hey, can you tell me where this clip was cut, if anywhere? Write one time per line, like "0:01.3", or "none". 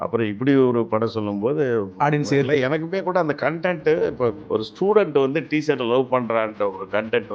0:04.4